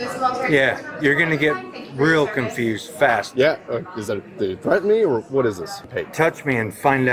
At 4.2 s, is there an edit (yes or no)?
no